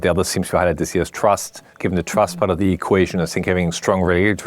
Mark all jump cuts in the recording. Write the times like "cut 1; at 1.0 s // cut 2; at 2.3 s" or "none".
cut 1; at 1.7 s